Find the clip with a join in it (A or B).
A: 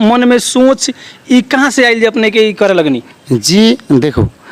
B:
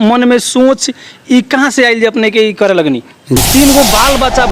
B